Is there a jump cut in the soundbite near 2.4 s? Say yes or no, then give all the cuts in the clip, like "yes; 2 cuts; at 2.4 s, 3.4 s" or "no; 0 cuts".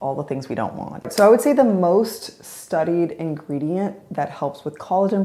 no; 1 cut; at 1.1 s